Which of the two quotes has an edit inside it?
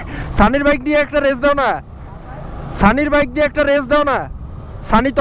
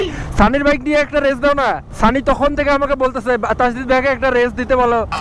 second; 1 cut; at 1.9 s

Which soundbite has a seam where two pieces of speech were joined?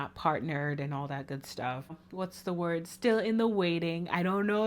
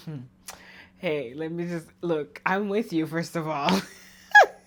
first; 1 cut; at 2.0 s

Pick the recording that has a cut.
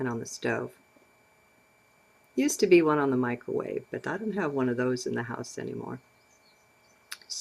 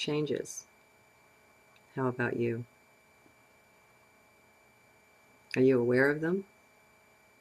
first; 1 cut; at 2.3 s

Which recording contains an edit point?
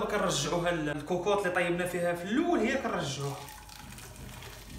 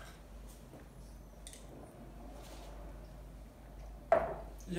first; 1 cut; at 0.9 s

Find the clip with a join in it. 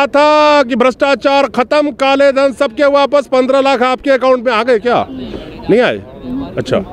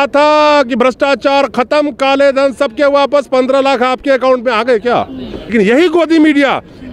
second; 1 cut; at 5.5 s

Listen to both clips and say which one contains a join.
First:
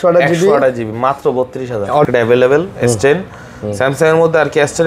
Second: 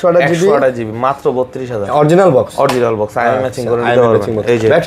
first; 1 cut; at 2.1 s

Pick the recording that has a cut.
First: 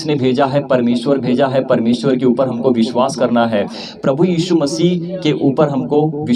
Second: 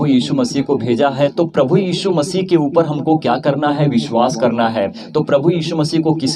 second; 2 cuts; at 1.3 s, 5.0 s

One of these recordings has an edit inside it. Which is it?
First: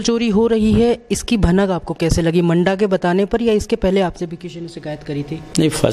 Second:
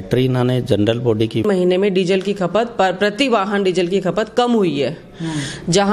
second; 1 cut; at 1.4 s

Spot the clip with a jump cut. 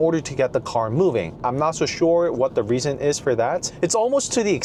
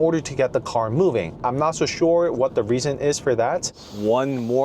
second; 1 cut; at 3.7 s

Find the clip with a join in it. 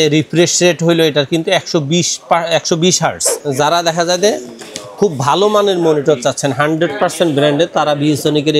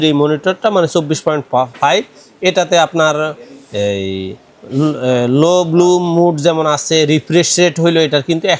first; 1 cut; at 3.3 s

